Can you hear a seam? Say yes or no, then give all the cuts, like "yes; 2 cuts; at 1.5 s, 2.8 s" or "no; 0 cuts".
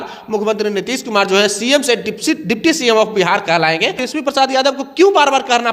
yes; 1 cut; at 4.0 s